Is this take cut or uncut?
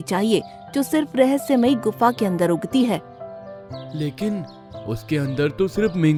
uncut